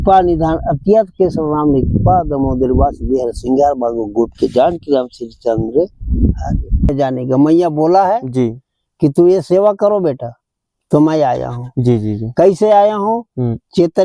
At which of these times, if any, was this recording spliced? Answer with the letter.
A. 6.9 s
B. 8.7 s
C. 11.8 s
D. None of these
A